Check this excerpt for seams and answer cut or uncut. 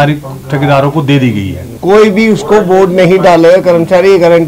cut